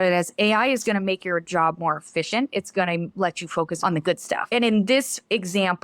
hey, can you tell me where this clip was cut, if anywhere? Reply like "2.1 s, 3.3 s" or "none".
3.9 s